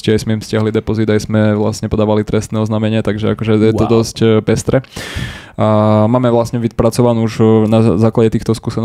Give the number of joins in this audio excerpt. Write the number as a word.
zero